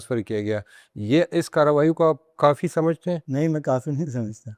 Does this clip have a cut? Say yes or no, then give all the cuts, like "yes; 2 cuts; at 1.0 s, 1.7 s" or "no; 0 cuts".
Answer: yes; 1 cut; at 3.2 s